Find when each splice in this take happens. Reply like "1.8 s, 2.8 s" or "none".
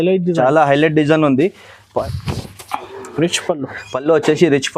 2.1 s